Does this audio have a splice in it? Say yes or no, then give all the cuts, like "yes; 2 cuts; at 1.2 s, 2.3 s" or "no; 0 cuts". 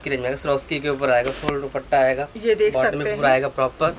no; 0 cuts